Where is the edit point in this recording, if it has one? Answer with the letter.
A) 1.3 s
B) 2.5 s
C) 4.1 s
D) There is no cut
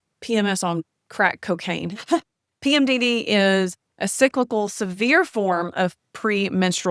D